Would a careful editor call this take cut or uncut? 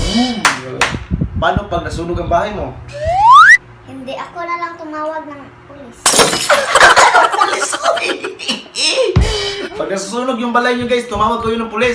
uncut